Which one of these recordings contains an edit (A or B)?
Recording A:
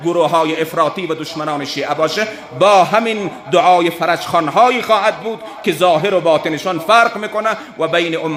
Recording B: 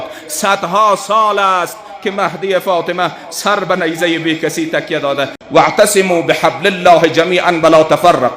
B